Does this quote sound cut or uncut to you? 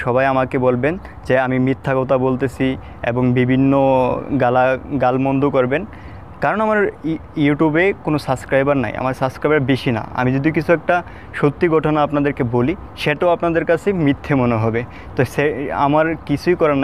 uncut